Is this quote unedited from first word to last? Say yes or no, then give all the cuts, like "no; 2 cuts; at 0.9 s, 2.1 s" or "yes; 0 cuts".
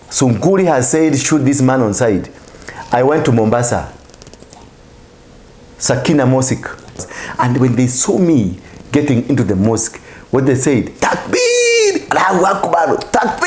no; 1 cut; at 7.2 s